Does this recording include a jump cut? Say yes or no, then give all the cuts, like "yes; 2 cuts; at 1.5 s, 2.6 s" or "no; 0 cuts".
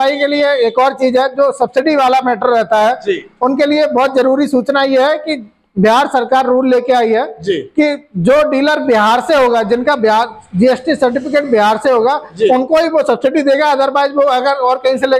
no; 0 cuts